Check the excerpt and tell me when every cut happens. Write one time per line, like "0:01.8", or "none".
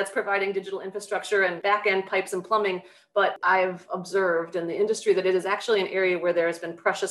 0:01.6
0:03.4